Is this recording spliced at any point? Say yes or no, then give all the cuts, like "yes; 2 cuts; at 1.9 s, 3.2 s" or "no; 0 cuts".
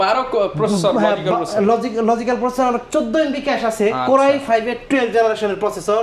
no; 0 cuts